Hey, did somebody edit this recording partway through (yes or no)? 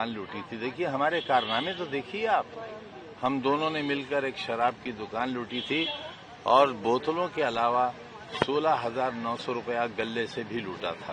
no